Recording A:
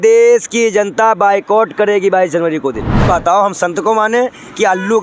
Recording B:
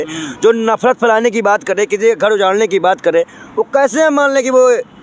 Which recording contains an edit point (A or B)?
A